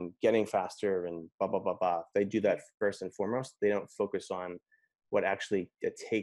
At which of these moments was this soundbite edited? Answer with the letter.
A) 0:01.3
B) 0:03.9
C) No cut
C